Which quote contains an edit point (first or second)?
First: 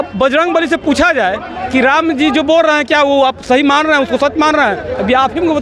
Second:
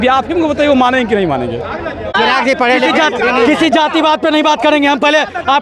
second